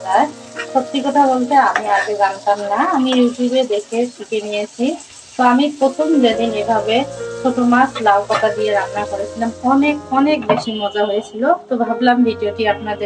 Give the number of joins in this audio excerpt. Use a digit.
0